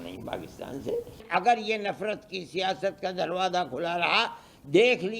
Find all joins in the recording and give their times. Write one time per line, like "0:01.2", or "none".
0:01.2